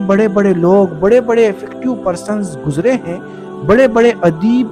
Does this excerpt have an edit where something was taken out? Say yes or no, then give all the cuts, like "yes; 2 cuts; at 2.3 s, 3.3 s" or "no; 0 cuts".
no; 0 cuts